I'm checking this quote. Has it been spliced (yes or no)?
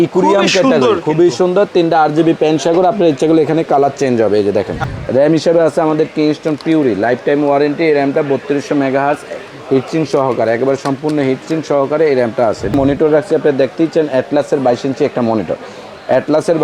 yes